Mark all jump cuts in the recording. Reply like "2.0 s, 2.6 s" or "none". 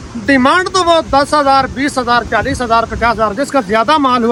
none